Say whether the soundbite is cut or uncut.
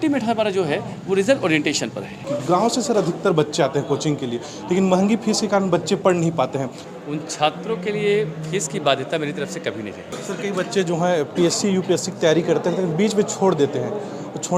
cut